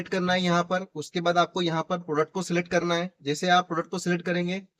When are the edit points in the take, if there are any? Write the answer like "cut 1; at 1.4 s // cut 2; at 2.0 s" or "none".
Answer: none